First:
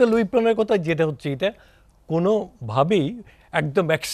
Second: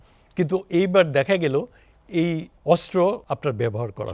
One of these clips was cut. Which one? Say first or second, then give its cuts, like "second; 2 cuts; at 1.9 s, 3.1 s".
second; 2 cuts; at 2.5 s, 3.2 s